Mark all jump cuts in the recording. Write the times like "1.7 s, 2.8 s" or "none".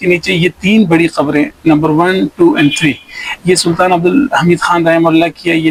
none

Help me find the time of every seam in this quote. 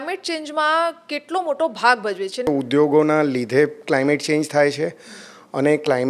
2.5 s

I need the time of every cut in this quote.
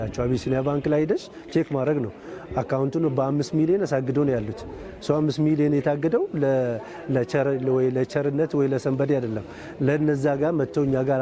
none

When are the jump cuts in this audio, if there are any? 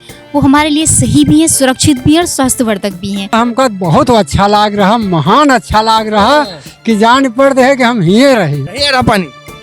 3.3 s, 8.7 s

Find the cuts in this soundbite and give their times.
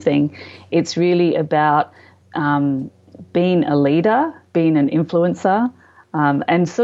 none

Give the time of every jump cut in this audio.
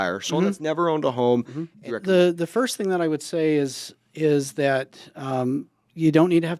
1.8 s

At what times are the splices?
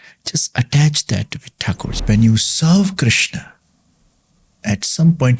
1.9 s

